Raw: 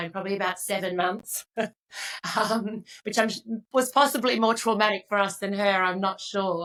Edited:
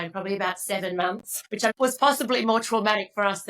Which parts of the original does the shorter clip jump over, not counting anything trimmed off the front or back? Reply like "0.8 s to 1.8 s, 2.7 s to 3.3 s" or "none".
1.5 s to 3.4 s